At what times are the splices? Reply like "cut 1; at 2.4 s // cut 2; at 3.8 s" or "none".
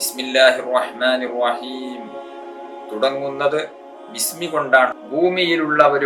cut 1; at 4.9 s